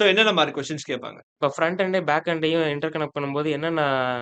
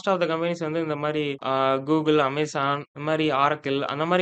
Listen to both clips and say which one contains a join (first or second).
first